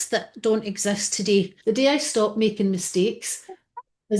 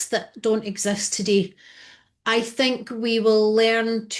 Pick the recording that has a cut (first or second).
first